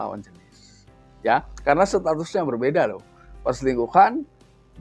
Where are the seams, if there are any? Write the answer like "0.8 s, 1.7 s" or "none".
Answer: none

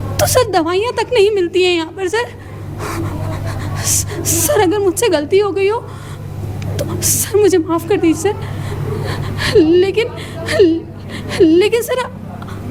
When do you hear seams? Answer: none

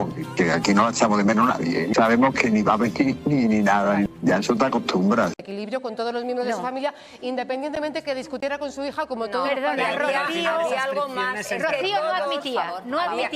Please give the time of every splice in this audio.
5.4 s

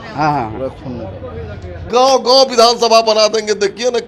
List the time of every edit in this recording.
1.9 s

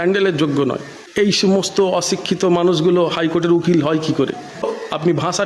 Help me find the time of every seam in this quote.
1.0 s, 4.7 s

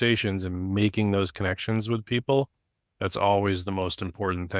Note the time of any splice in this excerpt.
none

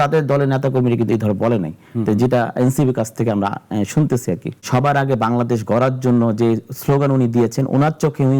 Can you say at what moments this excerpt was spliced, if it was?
4.7 s

